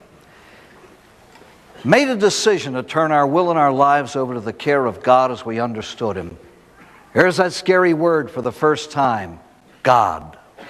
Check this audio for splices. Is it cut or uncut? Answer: cut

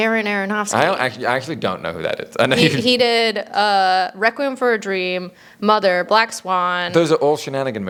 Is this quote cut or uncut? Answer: uncut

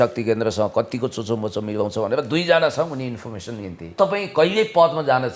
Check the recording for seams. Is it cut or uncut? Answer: cut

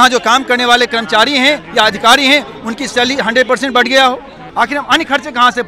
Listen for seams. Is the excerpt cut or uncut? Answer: cut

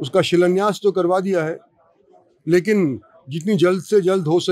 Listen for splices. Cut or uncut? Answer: uncut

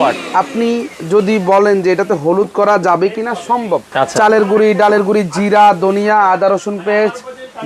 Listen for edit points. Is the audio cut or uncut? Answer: cut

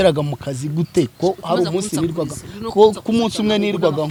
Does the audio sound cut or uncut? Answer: uncut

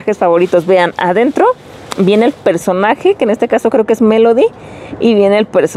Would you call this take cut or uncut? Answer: uncut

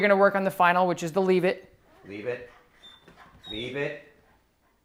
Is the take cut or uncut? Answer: uncut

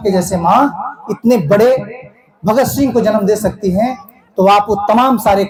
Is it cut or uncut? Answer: uncut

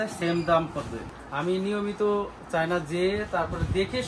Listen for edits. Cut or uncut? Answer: cut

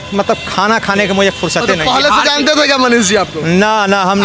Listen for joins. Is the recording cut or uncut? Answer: uncut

